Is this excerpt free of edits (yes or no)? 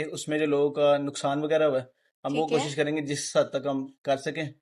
yes